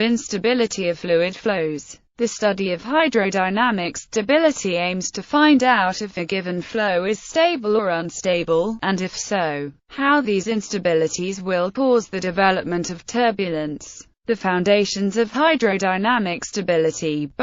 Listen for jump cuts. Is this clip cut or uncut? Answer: uncut